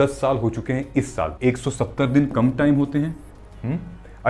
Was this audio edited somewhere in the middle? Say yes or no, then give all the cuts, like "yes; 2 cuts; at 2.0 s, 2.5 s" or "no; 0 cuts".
yes; 1 cut; at 1.3 s